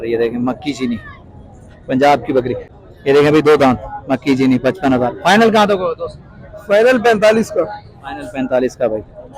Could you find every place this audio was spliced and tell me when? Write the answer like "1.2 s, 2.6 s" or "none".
2.7 s